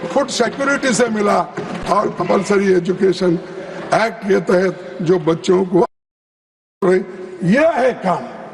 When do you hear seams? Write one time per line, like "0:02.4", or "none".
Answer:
none